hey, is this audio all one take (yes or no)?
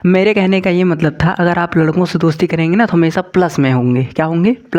yes